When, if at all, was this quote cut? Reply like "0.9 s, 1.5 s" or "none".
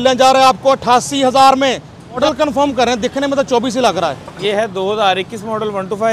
2.2 s, 4.3 s